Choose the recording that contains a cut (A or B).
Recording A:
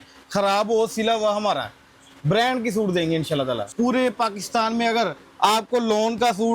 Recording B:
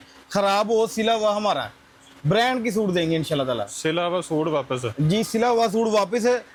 A